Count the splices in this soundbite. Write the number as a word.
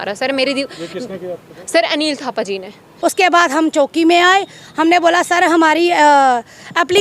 one